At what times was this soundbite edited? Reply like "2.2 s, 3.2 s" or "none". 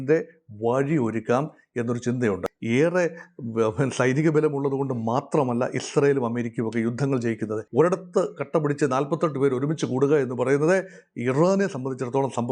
2.4 s, 7.6 s